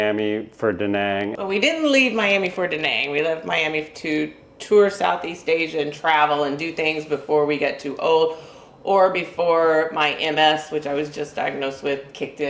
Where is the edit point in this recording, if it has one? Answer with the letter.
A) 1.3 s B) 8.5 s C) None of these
A